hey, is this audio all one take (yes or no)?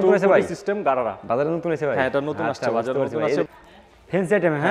no